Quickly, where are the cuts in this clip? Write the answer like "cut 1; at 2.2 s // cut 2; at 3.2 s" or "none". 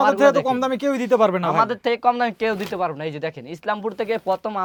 none